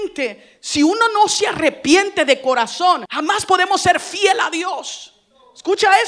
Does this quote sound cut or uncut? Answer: cut